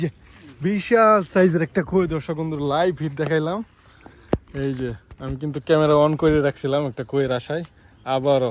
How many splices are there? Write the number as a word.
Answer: zero